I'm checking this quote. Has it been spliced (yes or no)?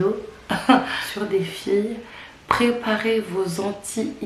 yes